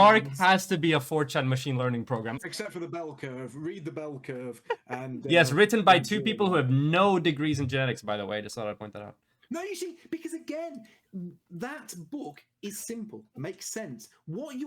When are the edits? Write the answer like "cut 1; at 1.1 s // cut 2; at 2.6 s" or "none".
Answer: cut 1; at 2.4 s